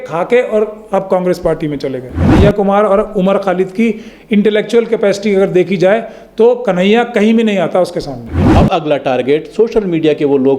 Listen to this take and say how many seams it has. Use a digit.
2